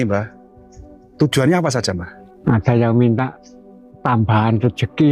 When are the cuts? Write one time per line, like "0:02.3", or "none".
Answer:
0:02.1